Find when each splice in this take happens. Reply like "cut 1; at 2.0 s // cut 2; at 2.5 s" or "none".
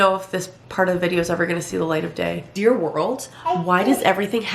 cut 1; at 2.5 s

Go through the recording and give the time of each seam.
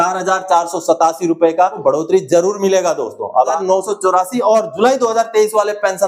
cut 1; at 1.8 s // cut 2; at 3.5 s

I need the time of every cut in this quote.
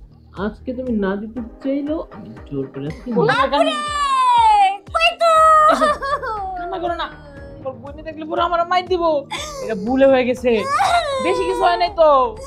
cut 1; at 3.3 s

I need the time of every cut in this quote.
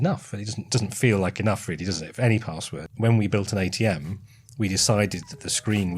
cut 1; at 2.8 s

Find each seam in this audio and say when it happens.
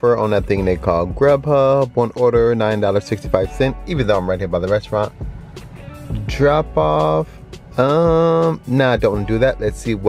none

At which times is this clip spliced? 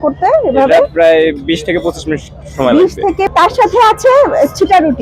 cut 1; at 3.3 s

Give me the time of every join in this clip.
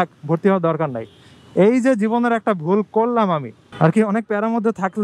cut 1; at 3.6 s

